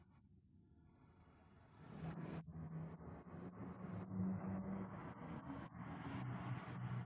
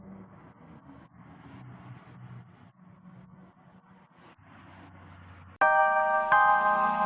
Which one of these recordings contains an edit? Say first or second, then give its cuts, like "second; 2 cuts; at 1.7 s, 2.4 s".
second; 1 cut; at 5.6 s